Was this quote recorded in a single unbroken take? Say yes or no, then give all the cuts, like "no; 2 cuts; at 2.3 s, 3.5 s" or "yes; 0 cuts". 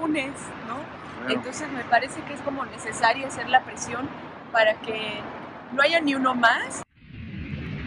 no; 1 cut; at 6.9 s